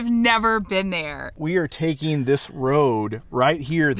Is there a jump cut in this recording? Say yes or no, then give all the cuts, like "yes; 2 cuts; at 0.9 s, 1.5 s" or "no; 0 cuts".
yes; 1 cut; at 1.3 s